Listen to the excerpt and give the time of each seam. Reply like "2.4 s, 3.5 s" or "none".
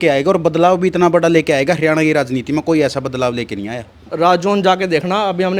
4.0 s